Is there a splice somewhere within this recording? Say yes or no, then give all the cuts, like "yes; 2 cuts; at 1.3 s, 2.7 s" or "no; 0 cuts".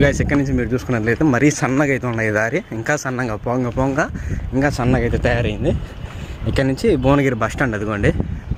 no; 0 cuts